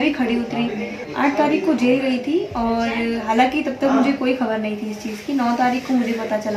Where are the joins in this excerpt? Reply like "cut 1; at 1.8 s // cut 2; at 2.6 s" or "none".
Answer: cut 1; at 1.0 s